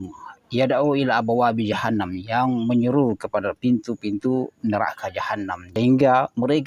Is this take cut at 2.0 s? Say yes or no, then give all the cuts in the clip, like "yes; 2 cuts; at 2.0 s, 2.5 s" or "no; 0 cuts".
no; 1 cut; at 5.7 s